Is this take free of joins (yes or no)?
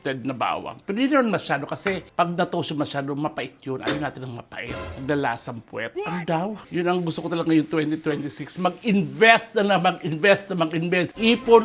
no